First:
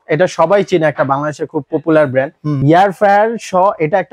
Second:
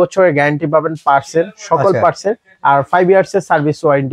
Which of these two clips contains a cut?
first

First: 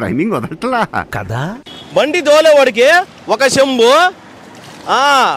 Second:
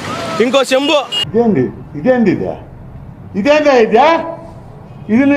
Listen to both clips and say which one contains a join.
first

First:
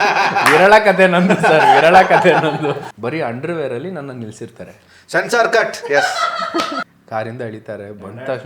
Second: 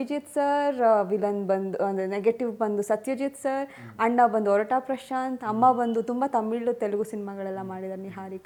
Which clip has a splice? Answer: first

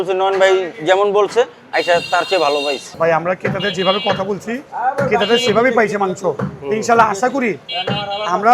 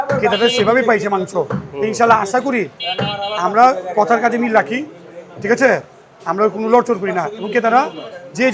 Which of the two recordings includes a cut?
first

